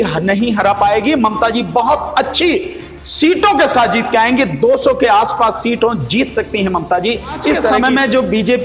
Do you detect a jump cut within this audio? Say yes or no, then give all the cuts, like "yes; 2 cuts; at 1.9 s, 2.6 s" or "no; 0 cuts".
yes; 1 cut; at 7.7 s